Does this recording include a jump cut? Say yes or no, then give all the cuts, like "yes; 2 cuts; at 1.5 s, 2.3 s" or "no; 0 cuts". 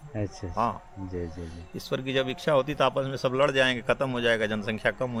no; 0 cuts